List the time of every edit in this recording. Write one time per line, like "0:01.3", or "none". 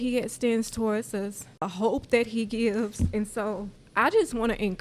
0:01.6
0:03.8